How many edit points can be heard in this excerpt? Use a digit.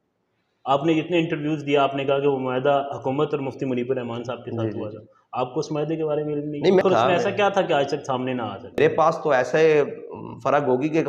2